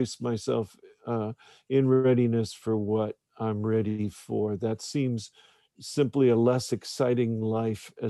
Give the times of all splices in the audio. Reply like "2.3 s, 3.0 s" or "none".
none

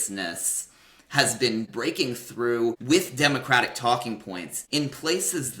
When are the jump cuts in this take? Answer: 1.7 s

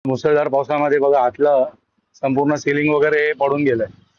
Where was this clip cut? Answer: none

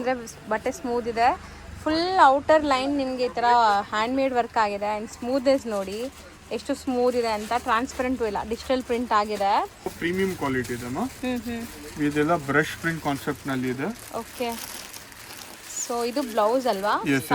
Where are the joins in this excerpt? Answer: 9.9 s

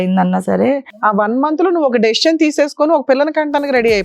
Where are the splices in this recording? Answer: 1.1 s

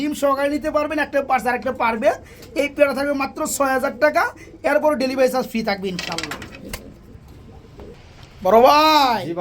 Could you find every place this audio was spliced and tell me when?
none

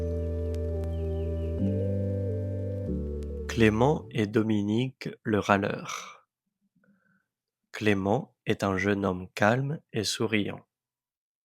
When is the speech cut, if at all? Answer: 3.5 s

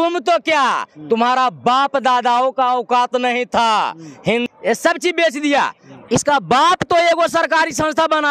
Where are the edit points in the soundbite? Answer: 4.4 s

